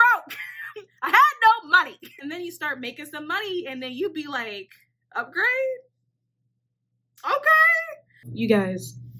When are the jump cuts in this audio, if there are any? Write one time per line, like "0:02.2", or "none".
0:02.1
0:08.3